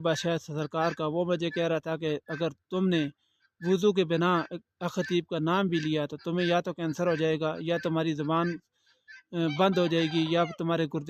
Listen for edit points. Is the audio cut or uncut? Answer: uncut